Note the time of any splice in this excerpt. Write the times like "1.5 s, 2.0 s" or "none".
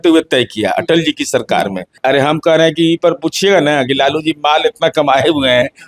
1.9 s